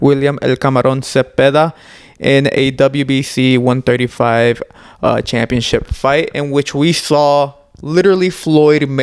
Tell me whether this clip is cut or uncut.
uncut